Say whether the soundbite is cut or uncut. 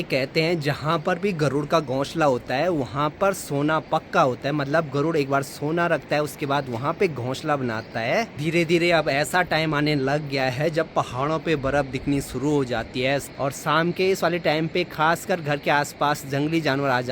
cut